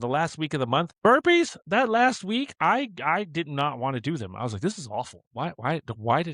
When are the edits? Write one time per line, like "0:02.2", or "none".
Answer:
0:00.9